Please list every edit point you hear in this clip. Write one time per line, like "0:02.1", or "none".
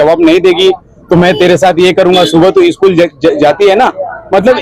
none